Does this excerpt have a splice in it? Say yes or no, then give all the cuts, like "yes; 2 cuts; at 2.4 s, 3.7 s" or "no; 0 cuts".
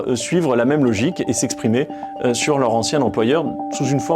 no; 0 cuts